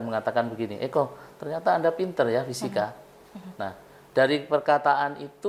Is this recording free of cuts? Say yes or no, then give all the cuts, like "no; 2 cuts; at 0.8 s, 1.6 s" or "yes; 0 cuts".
yes; 0 cuts